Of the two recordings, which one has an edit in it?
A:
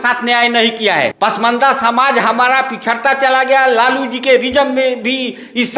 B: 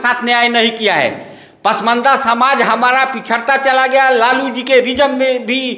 A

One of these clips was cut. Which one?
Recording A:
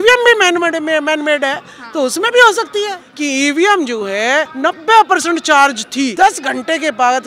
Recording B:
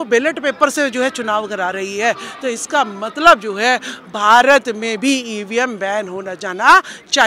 A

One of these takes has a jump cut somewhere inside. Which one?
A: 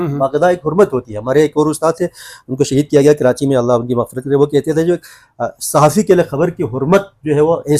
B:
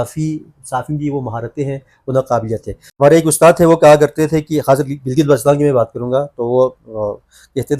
B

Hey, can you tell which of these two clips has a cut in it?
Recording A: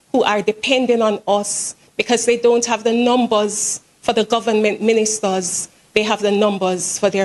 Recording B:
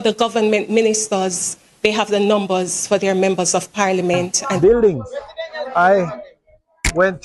B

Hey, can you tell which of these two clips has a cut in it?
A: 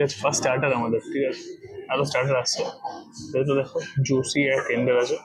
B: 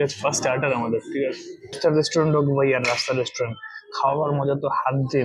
B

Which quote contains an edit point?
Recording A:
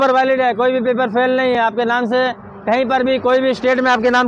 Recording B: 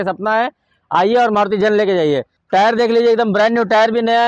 B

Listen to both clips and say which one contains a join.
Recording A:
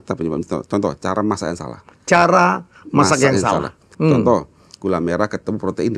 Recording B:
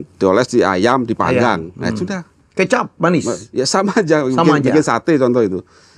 A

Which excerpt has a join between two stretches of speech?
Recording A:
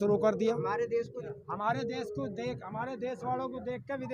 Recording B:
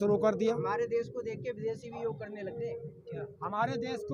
A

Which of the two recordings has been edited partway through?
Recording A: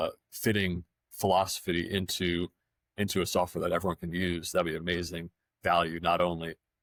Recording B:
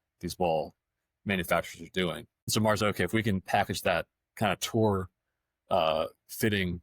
B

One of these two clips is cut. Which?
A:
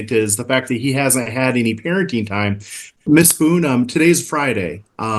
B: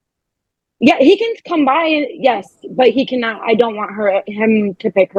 A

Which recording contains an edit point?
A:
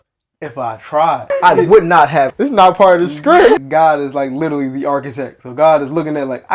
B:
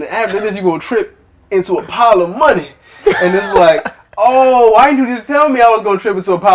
A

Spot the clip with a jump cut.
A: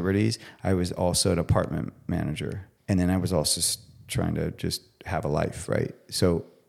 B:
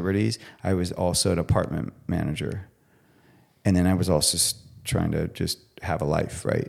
A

